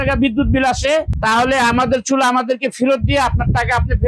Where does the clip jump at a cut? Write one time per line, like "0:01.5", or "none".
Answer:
0:01.1